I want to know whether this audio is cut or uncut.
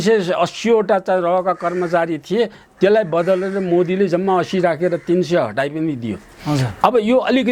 uncut